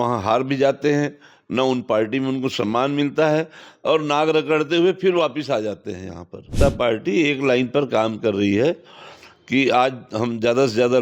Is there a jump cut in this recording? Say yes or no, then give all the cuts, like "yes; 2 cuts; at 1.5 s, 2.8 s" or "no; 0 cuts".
yes; 1 cut; at 6.5 s